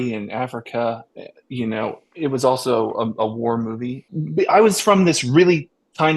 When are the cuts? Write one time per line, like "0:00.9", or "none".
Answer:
0:04.0